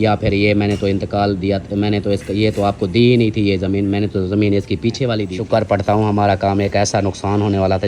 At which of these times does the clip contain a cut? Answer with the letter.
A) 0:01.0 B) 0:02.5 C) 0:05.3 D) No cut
C